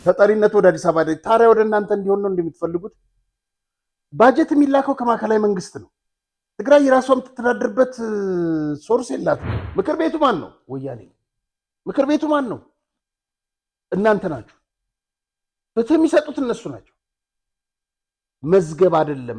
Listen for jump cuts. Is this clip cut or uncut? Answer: cut